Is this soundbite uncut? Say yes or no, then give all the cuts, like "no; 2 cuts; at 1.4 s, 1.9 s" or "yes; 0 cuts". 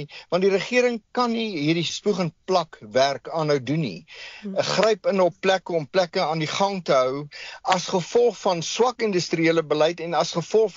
no; 1 cut; at 1.9 s